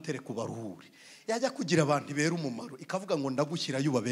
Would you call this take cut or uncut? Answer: uncut